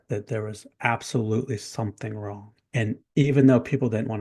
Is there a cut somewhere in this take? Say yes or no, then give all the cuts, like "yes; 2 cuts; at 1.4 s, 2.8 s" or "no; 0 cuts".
yes; 1 cut; at 3.0 s